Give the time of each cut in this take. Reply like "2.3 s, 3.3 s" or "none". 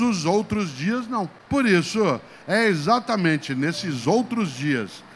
1.4 s